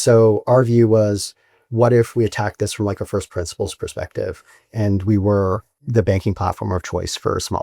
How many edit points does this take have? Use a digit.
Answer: 1